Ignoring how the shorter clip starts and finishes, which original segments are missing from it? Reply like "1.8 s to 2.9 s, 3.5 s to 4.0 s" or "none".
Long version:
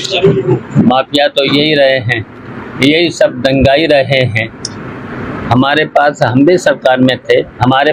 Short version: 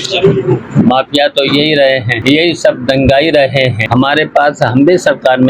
2.1 s to 2.7 s, 4.4 s to 5.4 s